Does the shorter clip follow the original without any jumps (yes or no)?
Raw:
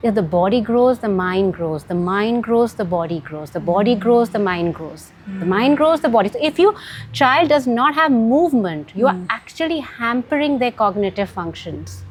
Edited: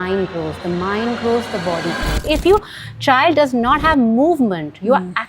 no